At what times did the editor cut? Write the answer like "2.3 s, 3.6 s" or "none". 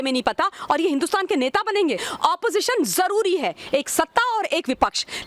2.1 s